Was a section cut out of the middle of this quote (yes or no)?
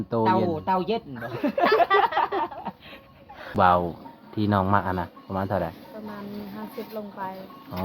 yes